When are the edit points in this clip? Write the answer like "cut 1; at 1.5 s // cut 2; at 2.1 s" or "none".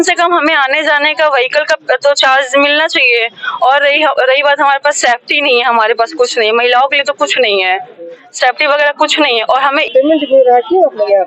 cut 1; at 9.9 s